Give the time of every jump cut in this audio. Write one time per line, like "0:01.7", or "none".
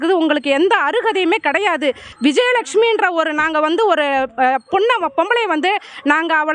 0:02.1